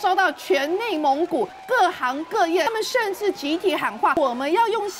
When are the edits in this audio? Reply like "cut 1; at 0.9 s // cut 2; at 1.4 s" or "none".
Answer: cut 1; at 1.6 s // cut 2; at 2.7 s // cut 3; at 4.2 s